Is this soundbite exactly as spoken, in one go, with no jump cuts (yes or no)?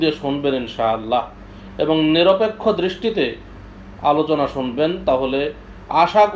yes